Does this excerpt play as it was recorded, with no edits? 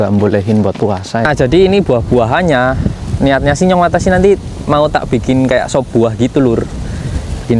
no; 1 cut; at 1.2 s

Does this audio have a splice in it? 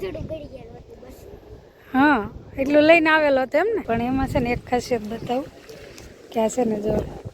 yes; 1 cut; at 3.8 s

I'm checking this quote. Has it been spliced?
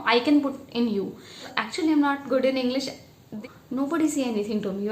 yes; 2 cuts; at 1.5 s, 3.4 s

